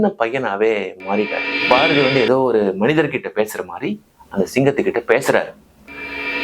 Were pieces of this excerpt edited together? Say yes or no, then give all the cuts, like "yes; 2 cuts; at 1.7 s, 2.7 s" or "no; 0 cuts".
yes; 1 cut; at 1.5 s